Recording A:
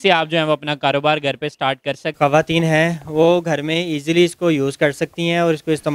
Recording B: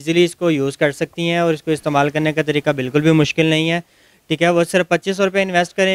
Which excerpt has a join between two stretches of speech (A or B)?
A